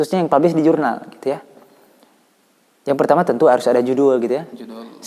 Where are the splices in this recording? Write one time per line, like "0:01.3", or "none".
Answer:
none